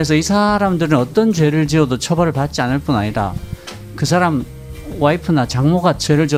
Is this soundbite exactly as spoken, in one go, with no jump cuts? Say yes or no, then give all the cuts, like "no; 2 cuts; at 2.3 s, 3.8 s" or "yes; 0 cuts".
yes; 0 cuts